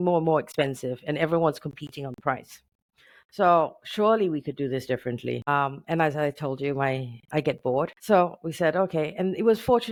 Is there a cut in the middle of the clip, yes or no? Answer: no